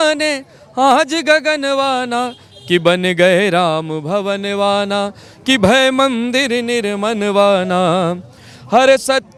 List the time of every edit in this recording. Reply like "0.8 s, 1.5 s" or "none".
none